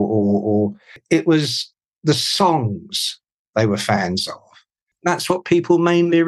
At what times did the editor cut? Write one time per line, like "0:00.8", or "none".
0:01.0
0:04.9